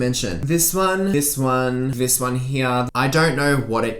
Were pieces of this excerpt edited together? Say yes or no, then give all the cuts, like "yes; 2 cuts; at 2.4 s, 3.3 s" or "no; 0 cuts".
yes; 1 cut; at 2.9 s